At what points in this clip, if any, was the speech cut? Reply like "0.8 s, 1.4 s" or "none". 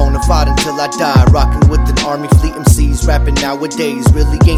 none